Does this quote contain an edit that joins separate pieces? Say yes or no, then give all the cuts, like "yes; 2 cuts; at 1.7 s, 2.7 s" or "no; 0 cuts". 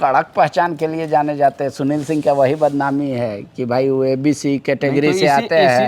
no; 0 cuts